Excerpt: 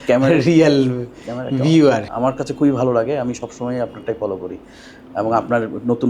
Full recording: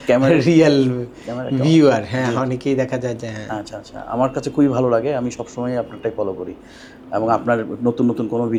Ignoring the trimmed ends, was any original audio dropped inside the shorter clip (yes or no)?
yes